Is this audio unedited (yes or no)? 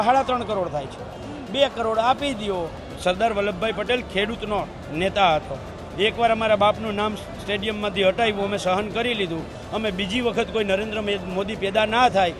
no